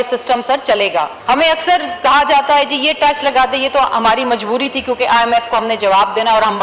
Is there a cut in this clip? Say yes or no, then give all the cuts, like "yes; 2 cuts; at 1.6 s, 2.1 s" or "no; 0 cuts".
yes; 1 cut; at 1.1 s